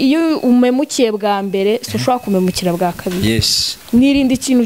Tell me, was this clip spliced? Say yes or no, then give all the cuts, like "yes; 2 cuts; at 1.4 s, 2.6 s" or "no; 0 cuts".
no; 0 cuts